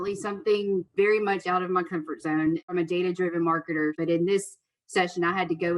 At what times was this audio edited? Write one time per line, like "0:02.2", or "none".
0:00.9
0:02.7
0:04.0